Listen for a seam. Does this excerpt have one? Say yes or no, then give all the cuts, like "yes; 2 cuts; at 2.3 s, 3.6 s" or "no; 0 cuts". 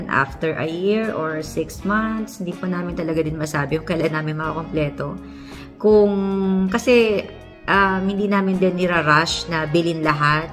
no; 0 cuts